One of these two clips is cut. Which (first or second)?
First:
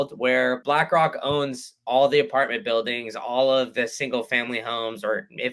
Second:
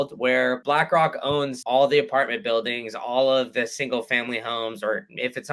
second